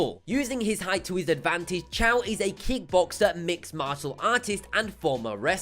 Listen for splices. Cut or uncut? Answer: cut